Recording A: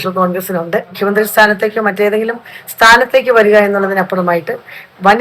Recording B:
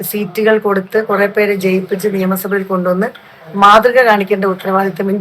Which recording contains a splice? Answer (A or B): A